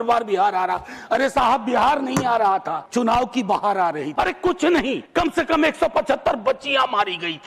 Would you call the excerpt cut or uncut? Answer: cut